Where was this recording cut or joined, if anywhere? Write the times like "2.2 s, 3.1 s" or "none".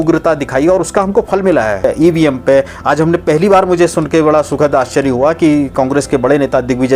1.9 s